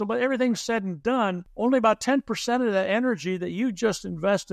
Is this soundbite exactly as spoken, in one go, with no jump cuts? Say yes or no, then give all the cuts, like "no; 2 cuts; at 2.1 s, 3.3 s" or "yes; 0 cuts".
no; 1 cut; at 1.5 s